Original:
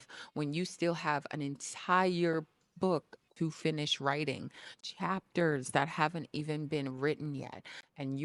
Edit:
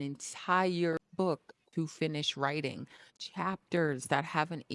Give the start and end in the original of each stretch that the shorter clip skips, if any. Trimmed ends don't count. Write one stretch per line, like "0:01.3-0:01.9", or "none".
0:02.5-0:02.7